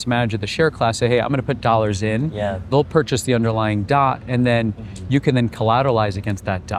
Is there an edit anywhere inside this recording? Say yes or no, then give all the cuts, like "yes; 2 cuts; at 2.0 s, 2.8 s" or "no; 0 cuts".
no; 0 cuts